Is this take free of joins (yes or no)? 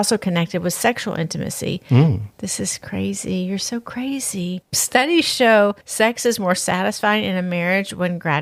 yes